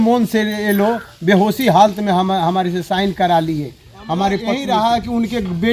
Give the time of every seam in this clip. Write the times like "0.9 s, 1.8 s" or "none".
4.5 s